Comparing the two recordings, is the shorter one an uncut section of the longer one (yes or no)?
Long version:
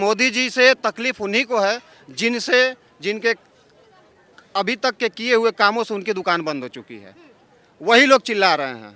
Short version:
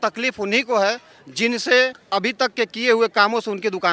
no